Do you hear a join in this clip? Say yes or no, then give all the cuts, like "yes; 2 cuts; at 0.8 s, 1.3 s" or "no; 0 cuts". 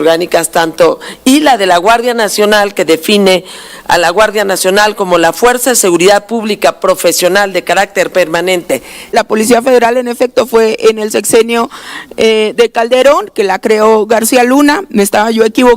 yes; 1 cut; at 9.1 s